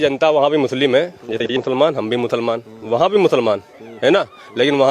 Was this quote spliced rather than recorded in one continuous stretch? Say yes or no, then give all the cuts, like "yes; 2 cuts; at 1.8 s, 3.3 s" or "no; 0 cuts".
yes; 1 cut; at 1.5 s